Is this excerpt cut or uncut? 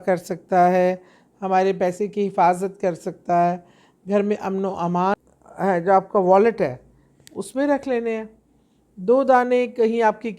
cut